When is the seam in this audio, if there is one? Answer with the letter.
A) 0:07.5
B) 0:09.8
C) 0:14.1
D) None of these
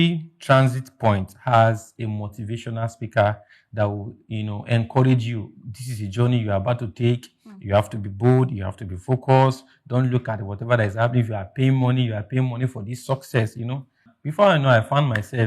C